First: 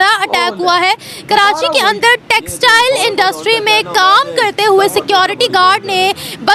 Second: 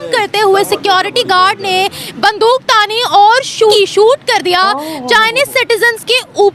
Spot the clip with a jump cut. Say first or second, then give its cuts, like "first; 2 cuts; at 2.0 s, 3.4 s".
second; 1 cut; at 3.7 s